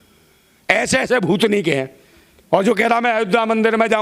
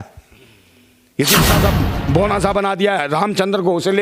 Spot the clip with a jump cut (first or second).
second